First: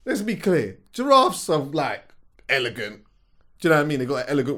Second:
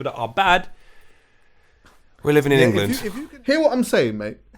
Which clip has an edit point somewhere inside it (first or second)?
second